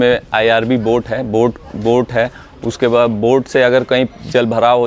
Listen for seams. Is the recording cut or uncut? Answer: uncut